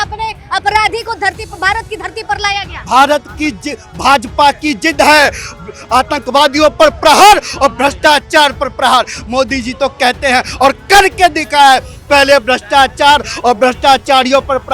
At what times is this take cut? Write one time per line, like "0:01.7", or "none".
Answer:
none